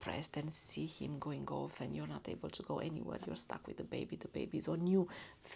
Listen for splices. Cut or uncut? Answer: uncut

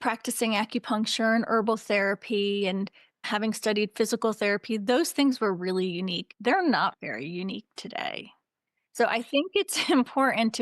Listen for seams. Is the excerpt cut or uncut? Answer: cut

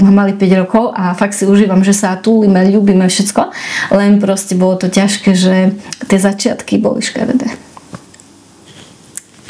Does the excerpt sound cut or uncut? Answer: uncut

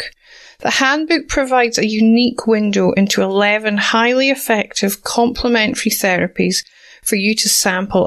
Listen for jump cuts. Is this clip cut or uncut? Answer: uncut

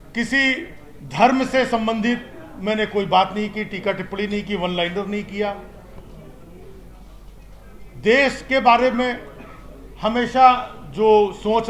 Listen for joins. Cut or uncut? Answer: uncut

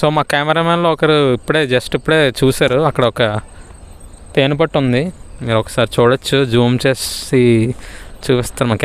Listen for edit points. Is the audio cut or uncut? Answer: uncut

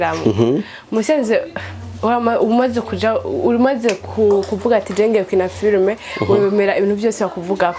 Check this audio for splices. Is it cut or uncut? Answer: uncut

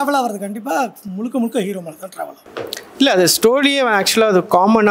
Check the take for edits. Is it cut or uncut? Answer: cut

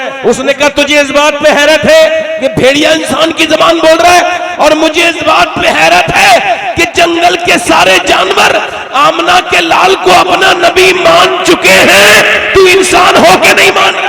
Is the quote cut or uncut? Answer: uncut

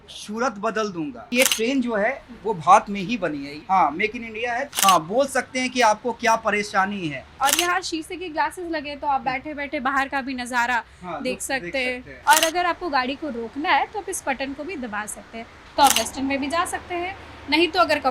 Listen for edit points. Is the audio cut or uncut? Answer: cut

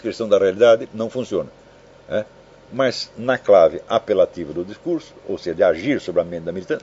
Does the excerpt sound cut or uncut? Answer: uncut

